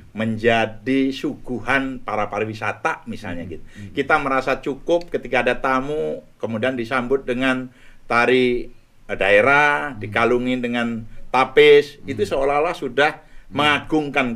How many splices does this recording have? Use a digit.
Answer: 0